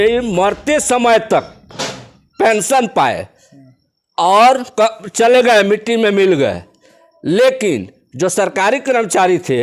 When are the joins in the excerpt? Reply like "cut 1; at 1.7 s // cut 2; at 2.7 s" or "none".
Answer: none